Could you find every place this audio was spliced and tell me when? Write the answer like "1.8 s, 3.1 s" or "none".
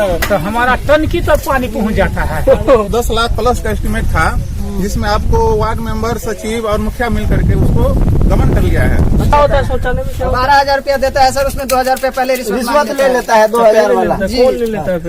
2.9 s, 9.3 s